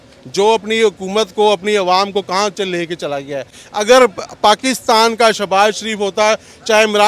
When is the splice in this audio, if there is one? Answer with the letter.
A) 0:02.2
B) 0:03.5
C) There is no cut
C